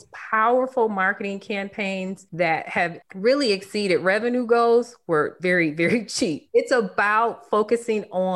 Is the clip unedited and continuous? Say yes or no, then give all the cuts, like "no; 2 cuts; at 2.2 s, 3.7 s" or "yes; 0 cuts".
no; 2 cuts; at 5.4 s, 6.4 s